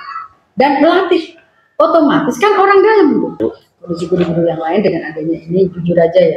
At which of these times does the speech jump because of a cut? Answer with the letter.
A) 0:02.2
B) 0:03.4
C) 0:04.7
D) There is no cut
B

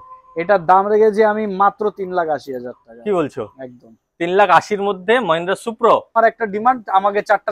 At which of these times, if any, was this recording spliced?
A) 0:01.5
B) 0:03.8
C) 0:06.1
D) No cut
C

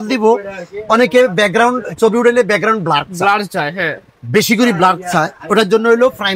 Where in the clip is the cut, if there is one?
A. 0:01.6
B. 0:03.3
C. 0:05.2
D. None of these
D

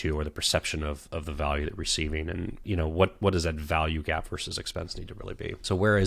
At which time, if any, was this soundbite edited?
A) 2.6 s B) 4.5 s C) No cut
A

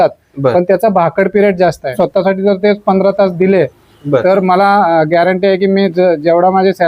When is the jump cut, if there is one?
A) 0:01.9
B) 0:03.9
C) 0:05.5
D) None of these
A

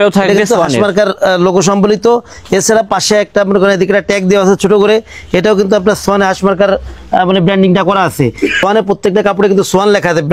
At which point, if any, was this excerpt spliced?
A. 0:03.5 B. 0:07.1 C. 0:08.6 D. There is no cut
C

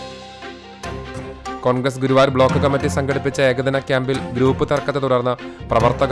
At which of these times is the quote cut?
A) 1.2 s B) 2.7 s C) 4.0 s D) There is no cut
A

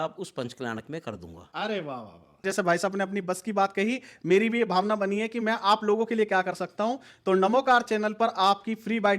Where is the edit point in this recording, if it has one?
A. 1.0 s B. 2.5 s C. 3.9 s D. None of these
B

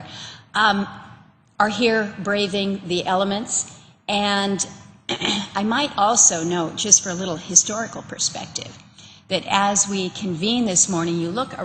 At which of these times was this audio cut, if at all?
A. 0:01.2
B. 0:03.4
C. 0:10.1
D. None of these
B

